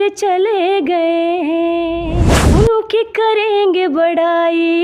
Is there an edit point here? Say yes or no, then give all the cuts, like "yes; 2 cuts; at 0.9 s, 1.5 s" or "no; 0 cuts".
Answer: yes; 1 cut; at 2.1 s